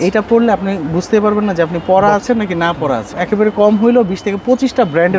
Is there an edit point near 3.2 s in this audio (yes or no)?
yes